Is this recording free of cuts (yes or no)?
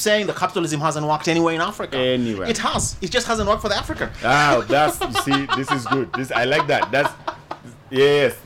yes